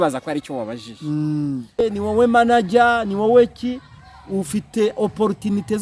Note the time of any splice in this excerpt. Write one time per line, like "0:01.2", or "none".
0:01.8